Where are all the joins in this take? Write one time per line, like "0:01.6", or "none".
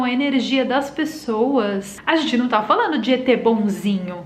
0:01.9